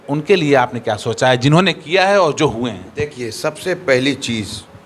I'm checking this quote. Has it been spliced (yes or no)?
no